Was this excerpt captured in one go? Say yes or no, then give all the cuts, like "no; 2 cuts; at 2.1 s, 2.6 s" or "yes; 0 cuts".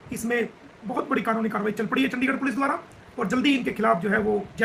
yes; 0 cuts